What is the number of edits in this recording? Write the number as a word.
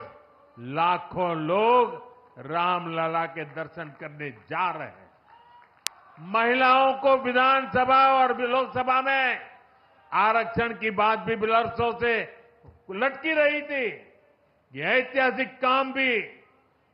one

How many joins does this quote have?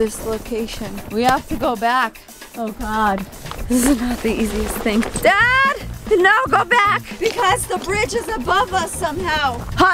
two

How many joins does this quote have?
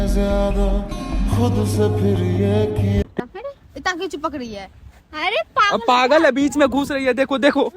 one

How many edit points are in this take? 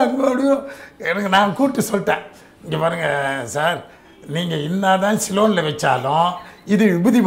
zero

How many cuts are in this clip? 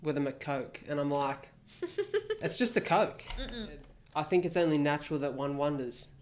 one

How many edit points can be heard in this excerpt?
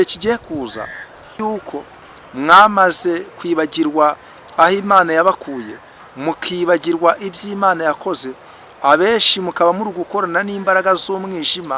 one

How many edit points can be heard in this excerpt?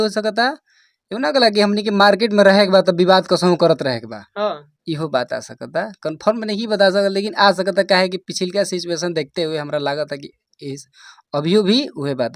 zero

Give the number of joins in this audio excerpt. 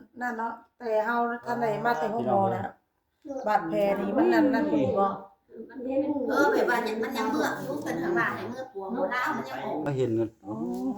one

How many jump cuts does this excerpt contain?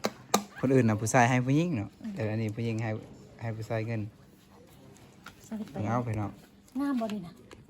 zero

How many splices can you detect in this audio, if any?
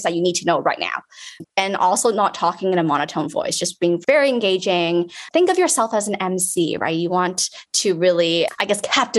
two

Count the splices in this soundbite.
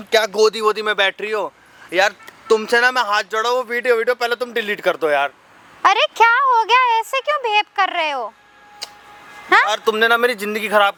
zero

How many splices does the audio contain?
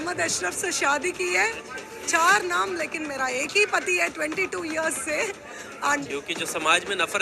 one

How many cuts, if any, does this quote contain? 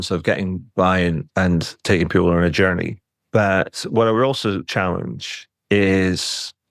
one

